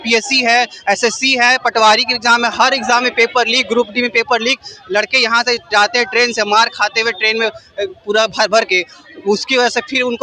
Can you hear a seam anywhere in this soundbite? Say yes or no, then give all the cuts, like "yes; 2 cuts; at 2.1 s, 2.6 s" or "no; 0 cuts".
no; 0 cuts